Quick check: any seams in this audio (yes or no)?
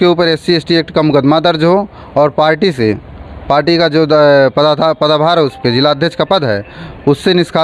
no